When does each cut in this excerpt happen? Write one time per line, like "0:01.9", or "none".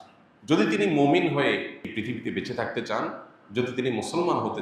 0:01.9